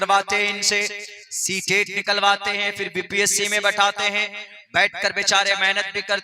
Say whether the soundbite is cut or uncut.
uncut